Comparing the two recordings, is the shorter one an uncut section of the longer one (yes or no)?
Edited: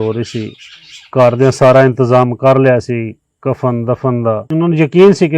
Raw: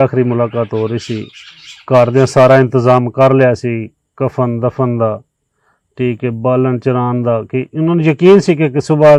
no